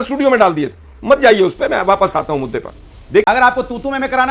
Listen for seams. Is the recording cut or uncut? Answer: cut